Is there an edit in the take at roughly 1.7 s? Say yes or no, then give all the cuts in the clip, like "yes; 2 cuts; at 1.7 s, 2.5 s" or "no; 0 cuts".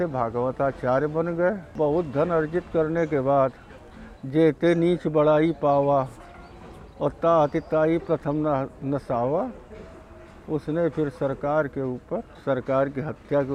yes; 2 cuts; at 1.7 s, 12.3 s